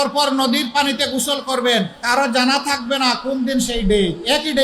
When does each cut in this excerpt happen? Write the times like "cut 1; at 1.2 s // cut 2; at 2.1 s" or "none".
cut 1; at 2.0 s